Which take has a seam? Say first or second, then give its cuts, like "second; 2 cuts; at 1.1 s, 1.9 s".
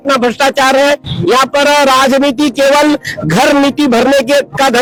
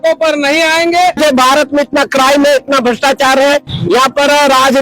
second; 1 cut; at 1.2 s